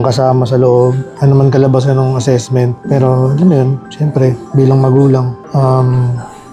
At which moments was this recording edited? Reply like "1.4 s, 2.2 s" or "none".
1.1 s